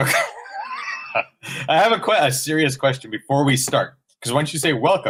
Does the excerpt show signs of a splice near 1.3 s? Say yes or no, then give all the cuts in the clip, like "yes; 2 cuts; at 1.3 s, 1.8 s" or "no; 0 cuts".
no; 0 cuts